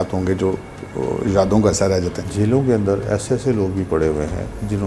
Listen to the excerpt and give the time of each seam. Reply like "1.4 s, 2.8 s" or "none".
2.3 s